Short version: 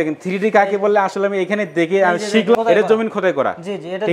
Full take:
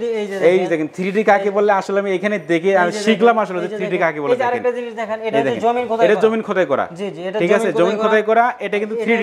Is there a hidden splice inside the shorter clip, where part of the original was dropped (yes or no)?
yes